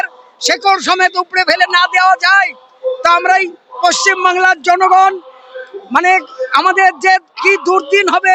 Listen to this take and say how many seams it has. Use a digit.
0